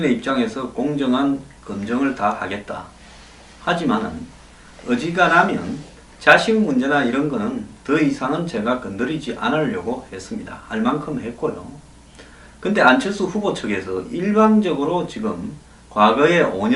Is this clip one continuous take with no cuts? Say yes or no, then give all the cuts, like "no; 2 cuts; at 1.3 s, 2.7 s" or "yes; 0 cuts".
yes; 0 cuts